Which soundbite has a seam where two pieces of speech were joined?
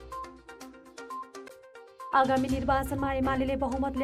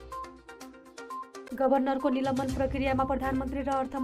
second; 1 cut; at 1.5 s

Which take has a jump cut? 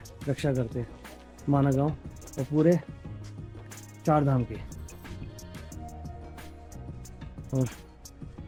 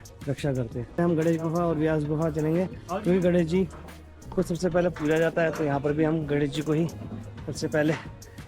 second; 1 cut; at 1.0 s

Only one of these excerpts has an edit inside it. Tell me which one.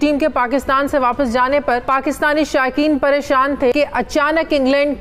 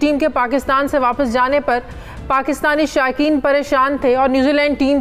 first; 2 cuts; at 1.8 s, 3.7 s

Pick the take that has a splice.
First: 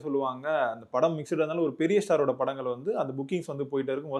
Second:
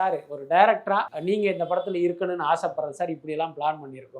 second; 1 cut; at 1.1 s

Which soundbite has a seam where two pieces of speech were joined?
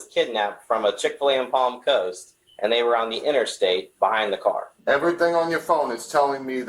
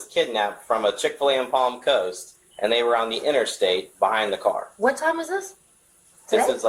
first; 1 cut; at 4.7 s

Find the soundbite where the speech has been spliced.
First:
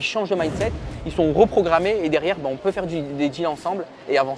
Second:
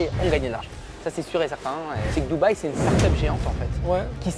second; 1 cut; at 2.0 s

